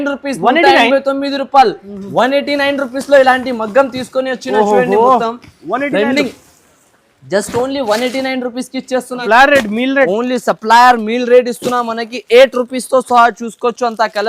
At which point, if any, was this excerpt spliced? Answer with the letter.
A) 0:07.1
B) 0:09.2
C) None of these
B